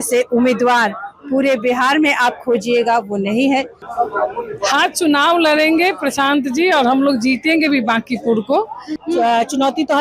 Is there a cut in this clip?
yes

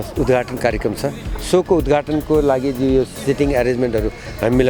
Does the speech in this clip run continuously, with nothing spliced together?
yes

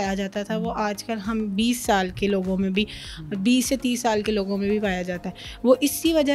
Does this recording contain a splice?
no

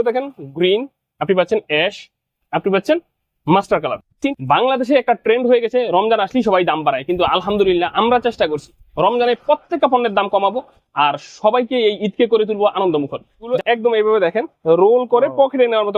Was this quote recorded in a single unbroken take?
no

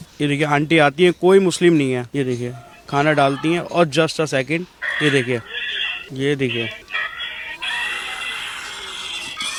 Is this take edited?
no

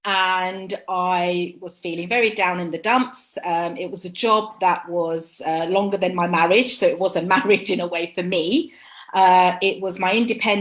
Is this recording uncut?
yes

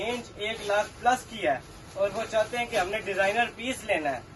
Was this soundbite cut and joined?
no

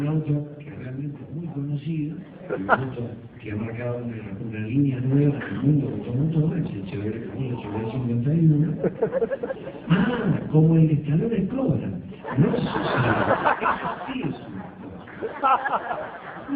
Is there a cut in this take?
yes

